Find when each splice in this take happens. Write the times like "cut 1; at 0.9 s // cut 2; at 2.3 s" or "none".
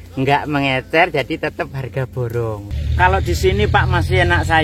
cut 1; at 2.7 s